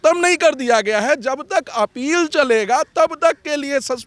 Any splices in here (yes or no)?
no